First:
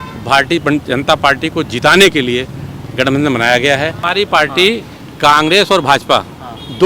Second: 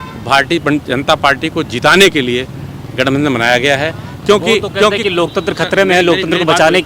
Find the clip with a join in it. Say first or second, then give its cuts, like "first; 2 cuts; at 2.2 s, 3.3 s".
first; 1 cut; at 4.0 s